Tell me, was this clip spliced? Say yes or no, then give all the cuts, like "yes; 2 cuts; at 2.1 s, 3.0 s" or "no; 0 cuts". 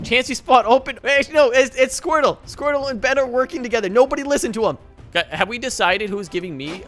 yes; 2 cuts; at 0.9 s, 4.9 s